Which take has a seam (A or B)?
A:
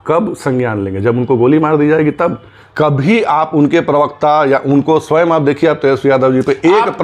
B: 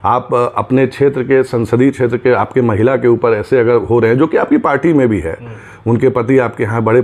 A